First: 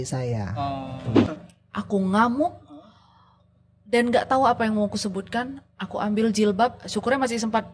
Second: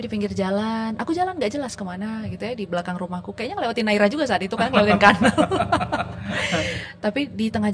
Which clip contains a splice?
first; 1 cut; at 1.2 s

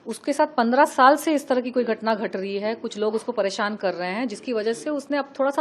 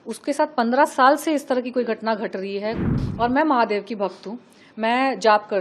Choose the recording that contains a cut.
second; 1 cut; at 2.9 s

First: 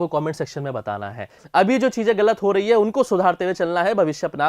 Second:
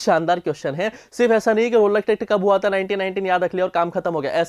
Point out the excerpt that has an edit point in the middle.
first; 1 cut; at 1.3 s

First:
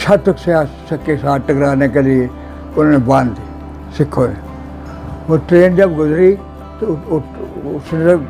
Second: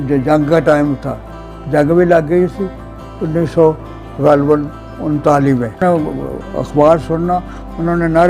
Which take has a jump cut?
second; 1 cut; at 5.8 s

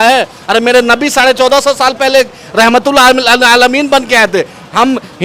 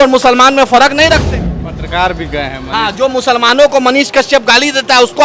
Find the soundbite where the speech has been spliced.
second; 1 cut; at 1.3 s

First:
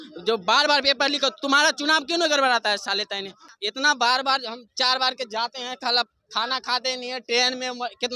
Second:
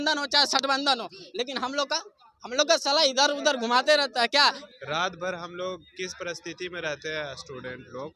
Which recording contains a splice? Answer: second; 1 cut; at 4.6 s

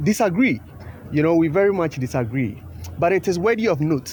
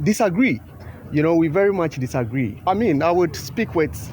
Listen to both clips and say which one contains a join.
second; 1 cut; at 2.6 s

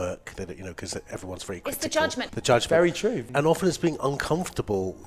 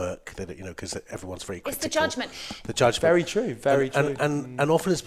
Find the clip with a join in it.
first; 2 cuts; at 2.3 s, 3.2 s

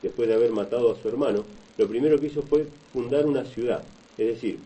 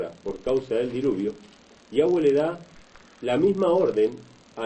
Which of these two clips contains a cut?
second; 1 cut; at 3.5 s

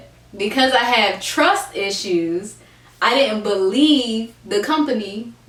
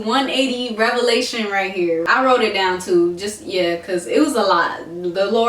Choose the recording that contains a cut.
second; 1 cut; at 2.1 s

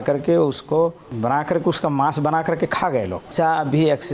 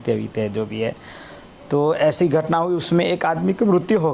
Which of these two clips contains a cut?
first; 2 cuts; at 1.1 s, 3.3 s

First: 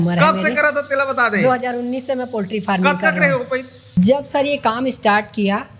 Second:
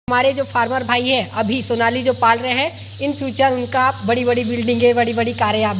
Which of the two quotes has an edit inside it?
first; 1 cut; at 4.0 s

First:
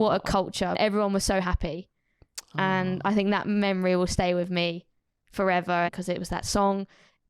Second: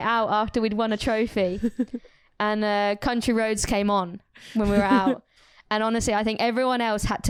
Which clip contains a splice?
first; 2 cuts; at 0.8 s, 5.9 s

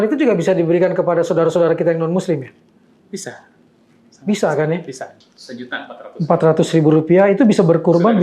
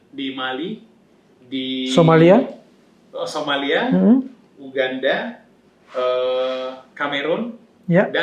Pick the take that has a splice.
first; 1 cut; at 5.1 s

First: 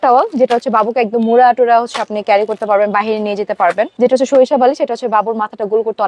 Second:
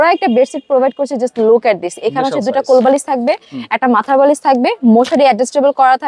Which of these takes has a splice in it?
first; 1 cut; at 3.9 s

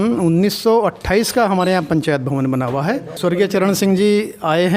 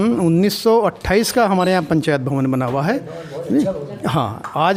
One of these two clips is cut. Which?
first; 1 cut; at 3.1 s

